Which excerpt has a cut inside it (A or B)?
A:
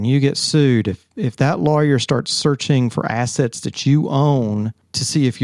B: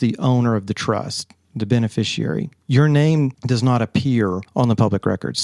B